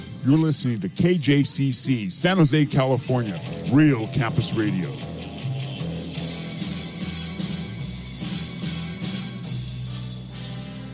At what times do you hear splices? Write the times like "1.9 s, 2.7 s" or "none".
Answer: none